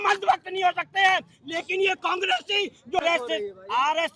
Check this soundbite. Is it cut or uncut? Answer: cut